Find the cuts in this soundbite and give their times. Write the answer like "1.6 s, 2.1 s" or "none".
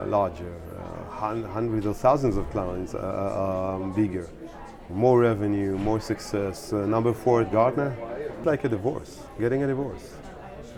8.4 s